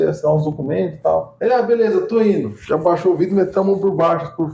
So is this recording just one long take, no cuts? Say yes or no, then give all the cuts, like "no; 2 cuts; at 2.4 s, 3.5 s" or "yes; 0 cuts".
no; 1 cut; at 2.6 s